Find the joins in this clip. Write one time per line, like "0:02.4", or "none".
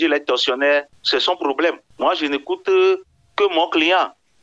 0:01.0
0:01.9